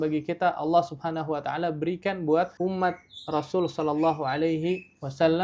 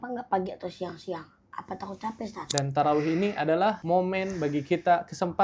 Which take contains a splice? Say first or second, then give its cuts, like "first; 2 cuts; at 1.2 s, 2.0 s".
second; 1 cut; at 2.5 s